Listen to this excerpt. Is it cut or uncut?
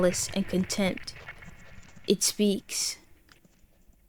uncut